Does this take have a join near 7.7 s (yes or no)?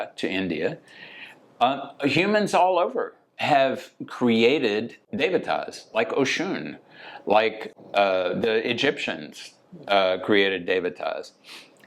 yes